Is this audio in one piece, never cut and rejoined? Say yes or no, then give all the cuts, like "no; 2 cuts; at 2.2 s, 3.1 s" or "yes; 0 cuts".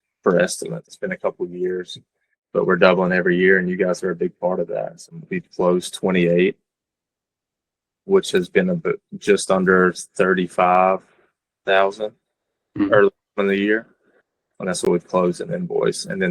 no; 2 cuts; at 0.9 s, 5.3 s